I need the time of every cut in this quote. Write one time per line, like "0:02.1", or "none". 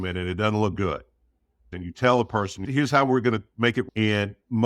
0:01.7
0:02.7